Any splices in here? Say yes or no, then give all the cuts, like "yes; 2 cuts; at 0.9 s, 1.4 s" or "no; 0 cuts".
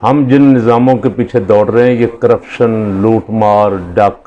no; 0 cuts